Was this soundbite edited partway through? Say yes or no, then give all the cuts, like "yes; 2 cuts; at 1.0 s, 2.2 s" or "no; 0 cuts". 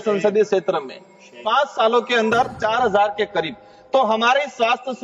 no; 0 cuts